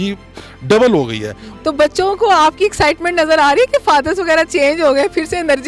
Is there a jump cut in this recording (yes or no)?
yes